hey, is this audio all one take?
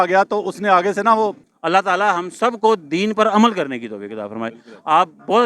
no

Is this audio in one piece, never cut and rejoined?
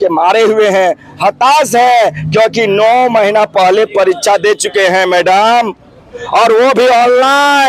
yes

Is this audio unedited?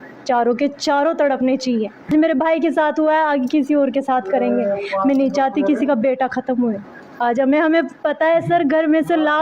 no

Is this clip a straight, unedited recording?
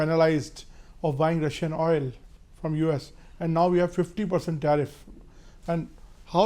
yes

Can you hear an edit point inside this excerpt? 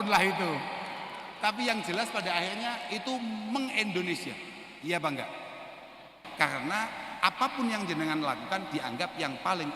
yes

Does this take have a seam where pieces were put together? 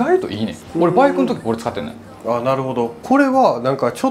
no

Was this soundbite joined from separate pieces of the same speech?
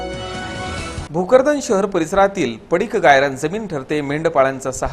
yes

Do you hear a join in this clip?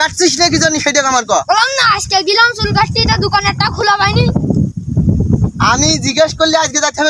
no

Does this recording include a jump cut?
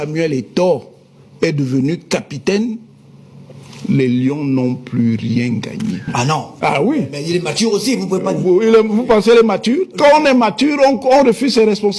yes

